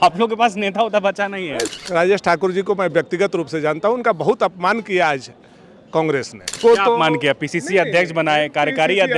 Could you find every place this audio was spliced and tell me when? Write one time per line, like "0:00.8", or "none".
0:01.7
0:06.6